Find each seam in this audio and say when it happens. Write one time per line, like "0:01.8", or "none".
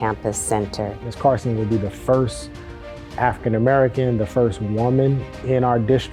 0:01.0